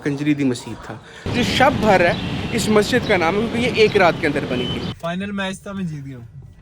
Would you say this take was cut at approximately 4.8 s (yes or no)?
yes